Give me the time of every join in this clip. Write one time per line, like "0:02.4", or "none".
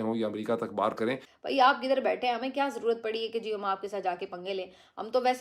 0:01.3